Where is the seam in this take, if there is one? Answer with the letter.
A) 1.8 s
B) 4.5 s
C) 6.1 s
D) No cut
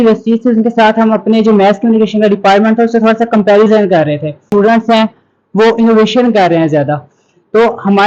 B